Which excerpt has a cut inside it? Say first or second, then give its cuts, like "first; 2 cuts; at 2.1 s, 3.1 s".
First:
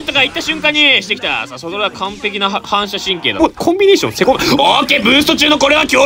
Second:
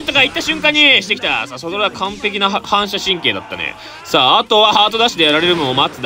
first; 1 cut; at 3.4 s